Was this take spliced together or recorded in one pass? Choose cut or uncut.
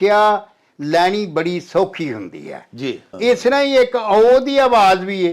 cut